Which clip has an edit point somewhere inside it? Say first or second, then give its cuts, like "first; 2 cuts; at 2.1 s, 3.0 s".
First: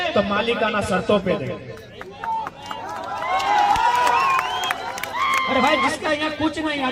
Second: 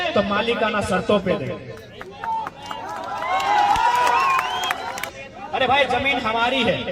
second; 1 cut; at 5.1 s